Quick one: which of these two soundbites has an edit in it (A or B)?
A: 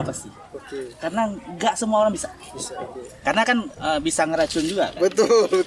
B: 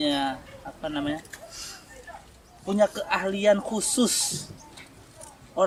A